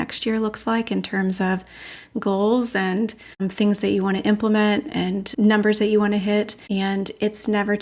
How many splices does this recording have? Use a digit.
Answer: 3